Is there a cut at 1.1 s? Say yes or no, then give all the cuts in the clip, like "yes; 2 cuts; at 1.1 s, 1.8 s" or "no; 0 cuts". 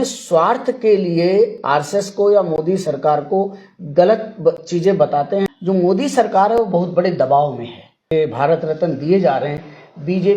no; 2 cuts; at 5.5 s, 8.1 s